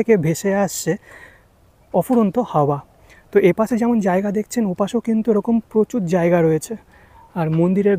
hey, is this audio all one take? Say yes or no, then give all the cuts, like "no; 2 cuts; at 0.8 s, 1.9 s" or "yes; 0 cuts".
yes; 0 cuts